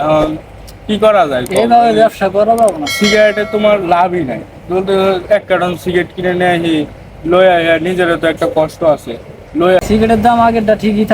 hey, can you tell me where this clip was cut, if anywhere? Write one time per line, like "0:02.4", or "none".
0:09.8